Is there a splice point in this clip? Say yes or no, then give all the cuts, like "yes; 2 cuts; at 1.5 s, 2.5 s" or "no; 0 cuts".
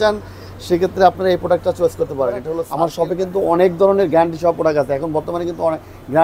yes; 1 cut; at 2.6 s